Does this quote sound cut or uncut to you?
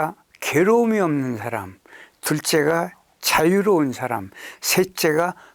uncut